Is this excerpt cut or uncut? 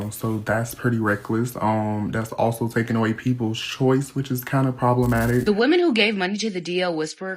cut